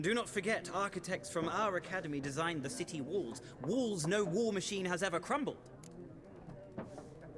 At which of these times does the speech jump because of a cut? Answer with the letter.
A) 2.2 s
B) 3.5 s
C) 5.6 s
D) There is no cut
C